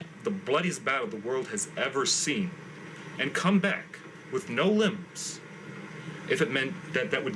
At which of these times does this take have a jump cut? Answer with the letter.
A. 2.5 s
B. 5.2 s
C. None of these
C